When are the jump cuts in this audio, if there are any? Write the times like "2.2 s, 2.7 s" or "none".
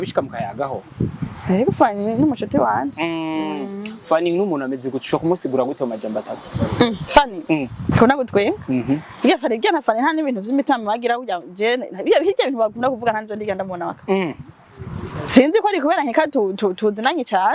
7.9 s